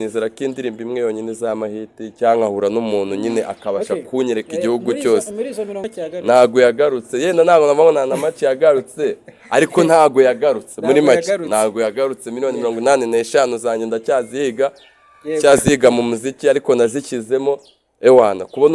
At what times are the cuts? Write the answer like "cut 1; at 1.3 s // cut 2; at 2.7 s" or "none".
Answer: cut 1; at 5.8 s